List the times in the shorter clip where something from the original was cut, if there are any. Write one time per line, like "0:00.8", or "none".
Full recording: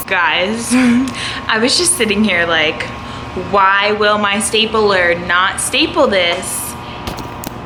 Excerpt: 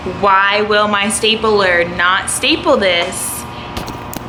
none

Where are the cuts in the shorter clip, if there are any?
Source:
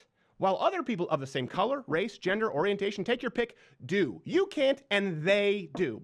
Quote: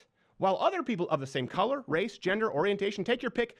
none

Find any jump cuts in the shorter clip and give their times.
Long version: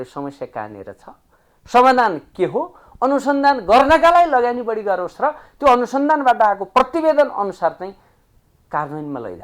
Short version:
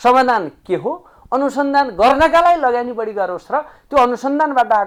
none

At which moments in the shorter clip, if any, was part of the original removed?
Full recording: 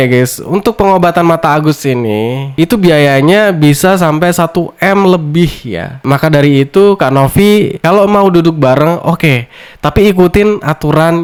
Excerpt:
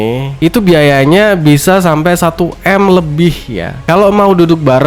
0:03.8

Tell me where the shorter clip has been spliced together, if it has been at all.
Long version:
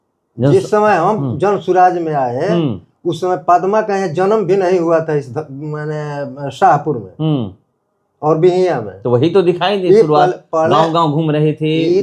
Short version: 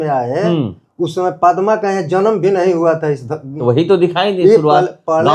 0:03.5

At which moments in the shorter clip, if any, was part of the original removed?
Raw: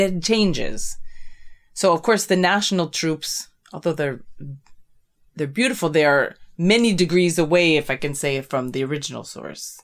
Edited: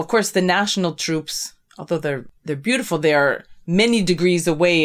0:02.3

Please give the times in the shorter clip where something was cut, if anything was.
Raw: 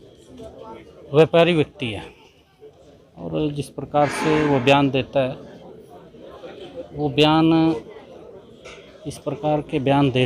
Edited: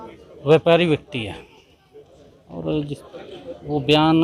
0:03.0

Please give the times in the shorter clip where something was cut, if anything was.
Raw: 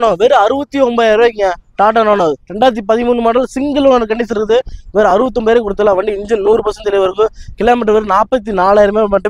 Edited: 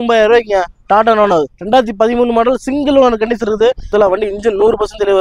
0:03.9

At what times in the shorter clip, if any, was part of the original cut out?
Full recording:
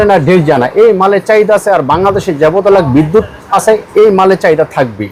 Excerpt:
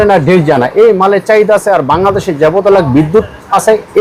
none

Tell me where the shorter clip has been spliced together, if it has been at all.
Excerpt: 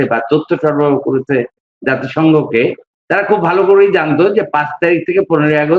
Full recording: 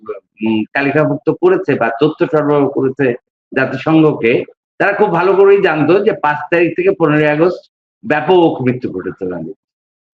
none

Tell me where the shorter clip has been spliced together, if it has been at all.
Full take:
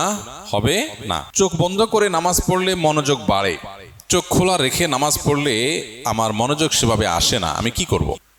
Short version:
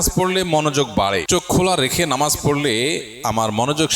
0:01.2

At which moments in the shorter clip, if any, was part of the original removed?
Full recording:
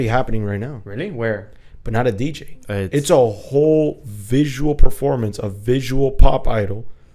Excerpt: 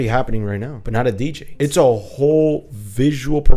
0:01.0

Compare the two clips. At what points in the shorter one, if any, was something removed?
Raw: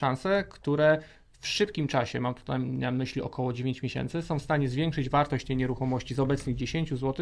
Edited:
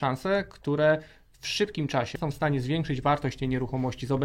0:02.2

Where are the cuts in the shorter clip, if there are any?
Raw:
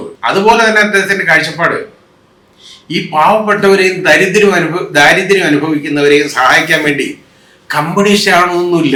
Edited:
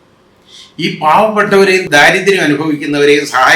0:01.9

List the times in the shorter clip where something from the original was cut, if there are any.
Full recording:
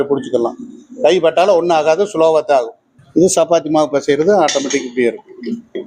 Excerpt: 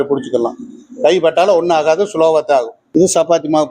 0:02.8

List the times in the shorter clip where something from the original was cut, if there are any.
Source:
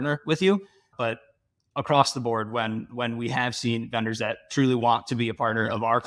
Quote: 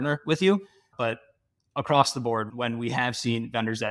0:02.5

